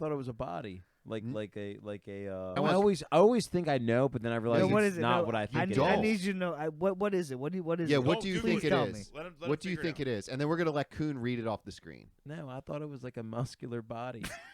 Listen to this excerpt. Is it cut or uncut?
cut